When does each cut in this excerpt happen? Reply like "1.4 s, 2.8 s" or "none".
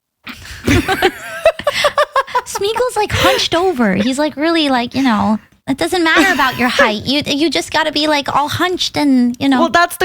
5.5 s